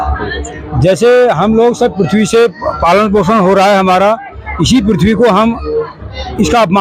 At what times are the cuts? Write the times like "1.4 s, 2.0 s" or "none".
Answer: none